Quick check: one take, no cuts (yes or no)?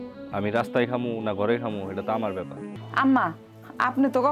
no